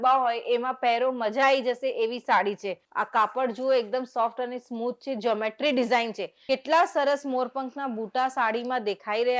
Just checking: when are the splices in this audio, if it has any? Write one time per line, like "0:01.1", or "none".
0:02.8
0:06.3